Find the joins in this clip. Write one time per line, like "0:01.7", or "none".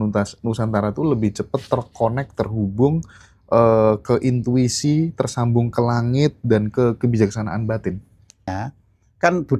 0:08.5